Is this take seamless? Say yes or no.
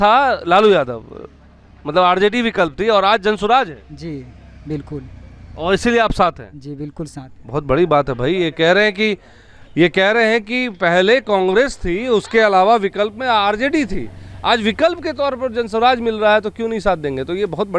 yes